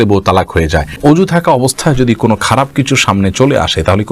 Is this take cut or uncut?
cut